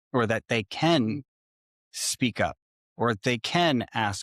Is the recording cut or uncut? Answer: uncut